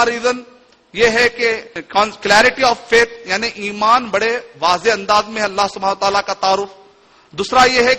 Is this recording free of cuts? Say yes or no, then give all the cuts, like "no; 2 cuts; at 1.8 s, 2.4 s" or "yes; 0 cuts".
no; 1 cut; at 1.7 s